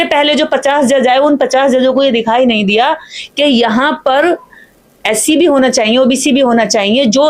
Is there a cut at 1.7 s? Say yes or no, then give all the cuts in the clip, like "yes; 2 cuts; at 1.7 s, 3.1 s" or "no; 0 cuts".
no; 0 cuts